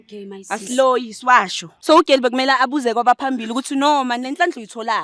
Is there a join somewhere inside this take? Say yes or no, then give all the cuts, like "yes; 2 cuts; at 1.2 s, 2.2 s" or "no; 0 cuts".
yes; 1 cut; at 1.7 s